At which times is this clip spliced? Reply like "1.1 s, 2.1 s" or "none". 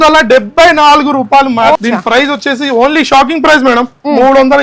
1.8 s